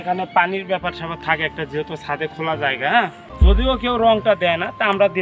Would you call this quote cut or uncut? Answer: cut